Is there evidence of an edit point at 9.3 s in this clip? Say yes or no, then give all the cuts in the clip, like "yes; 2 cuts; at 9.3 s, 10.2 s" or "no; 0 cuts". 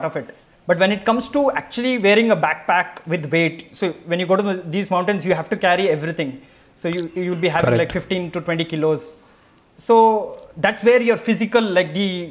no; 0 cuts